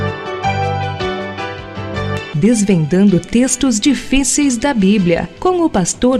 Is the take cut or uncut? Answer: uncut